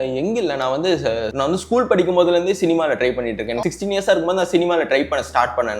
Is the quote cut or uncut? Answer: cut